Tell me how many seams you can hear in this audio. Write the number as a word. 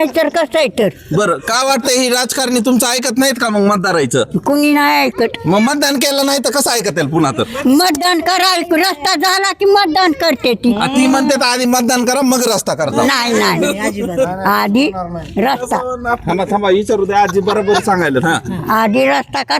zero